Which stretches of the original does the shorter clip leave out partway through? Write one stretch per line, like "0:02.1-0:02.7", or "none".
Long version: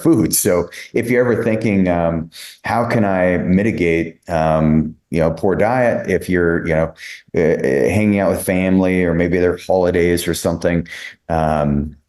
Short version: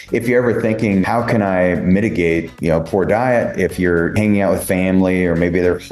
0:01.9-0:02.7
0:04.1-0:05.0
0:06.6-0:07.9